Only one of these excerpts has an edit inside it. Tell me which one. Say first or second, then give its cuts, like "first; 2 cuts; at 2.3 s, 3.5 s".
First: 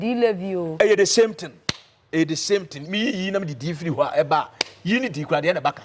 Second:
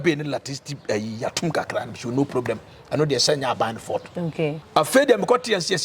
second; 1 cut; at 4.6 s